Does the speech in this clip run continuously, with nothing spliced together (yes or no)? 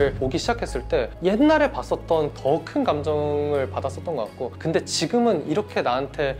no